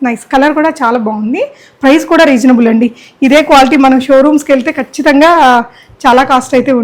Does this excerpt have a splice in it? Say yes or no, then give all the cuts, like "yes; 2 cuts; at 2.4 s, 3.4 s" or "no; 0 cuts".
no; 0 cuts